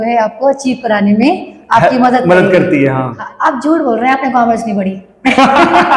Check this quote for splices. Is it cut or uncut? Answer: cut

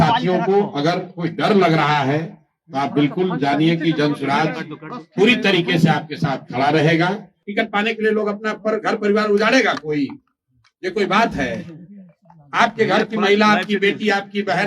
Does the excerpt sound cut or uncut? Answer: cut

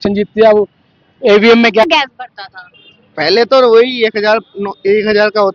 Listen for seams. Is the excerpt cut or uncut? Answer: cut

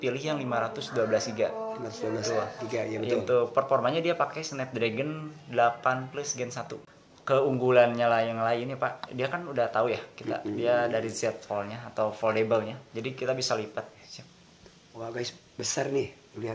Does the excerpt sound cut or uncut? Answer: cut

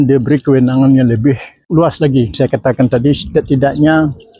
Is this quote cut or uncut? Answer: cut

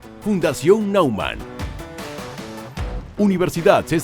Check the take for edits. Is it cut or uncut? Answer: cut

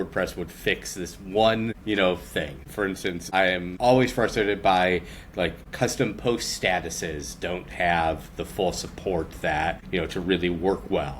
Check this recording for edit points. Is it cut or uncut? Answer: cut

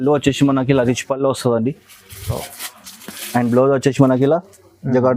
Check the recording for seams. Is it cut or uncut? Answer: uncut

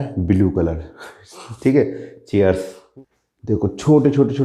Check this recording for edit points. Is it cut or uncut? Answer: cut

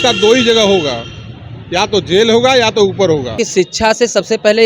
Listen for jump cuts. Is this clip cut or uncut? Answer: cut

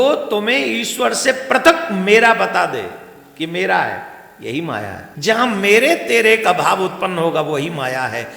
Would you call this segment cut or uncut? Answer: cut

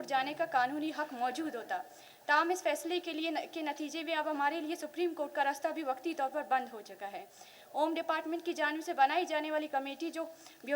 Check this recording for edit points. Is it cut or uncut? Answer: uncut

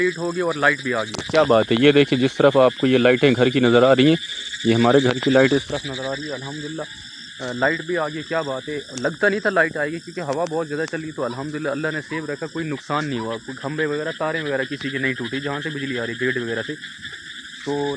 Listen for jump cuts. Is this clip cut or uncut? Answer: uncut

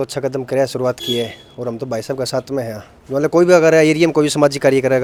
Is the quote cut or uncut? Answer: uncut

